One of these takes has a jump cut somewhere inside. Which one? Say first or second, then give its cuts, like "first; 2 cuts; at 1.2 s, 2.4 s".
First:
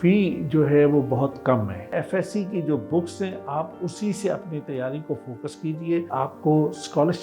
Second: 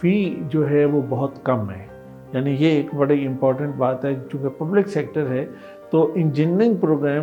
first; 2 cuts; at 2.0 s, 6.1 s